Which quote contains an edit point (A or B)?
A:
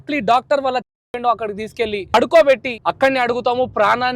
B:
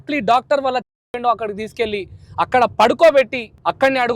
A